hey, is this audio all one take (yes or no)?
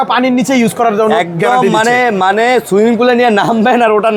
yes